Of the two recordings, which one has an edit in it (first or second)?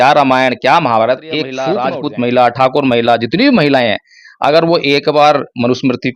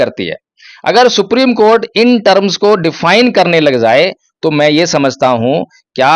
first